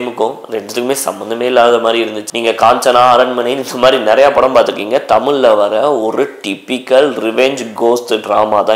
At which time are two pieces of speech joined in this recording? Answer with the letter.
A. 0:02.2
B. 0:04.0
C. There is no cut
A